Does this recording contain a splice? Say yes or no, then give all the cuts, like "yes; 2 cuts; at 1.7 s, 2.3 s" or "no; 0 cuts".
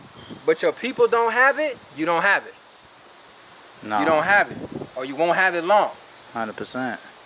no; 0 cuts